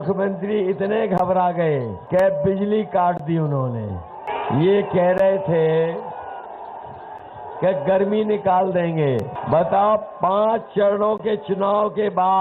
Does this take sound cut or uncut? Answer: cut